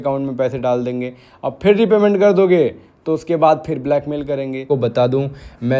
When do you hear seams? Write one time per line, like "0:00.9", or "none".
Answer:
0:04.6